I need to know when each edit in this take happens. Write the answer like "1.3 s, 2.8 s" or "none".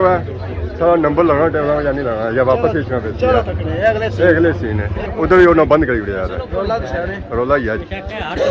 4.9 s